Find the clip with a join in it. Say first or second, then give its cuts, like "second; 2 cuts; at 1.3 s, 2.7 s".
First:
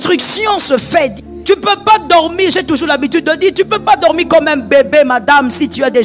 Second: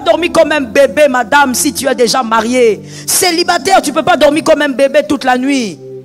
first; 1 cut; at 1.2 s